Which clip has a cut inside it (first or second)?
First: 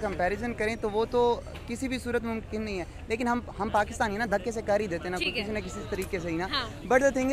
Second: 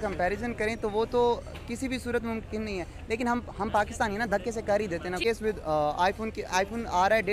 second